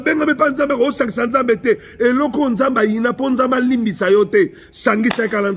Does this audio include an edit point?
no; 0 cuts

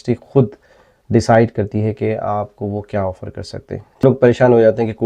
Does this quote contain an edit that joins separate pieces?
yes; 1 cut; at 4.0 s

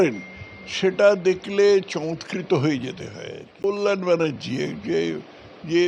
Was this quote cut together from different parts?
yes; 1 cut; at 3.5 s

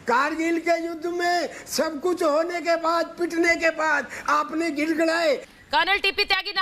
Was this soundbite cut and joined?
yes; 1 cut; at 5.5 s

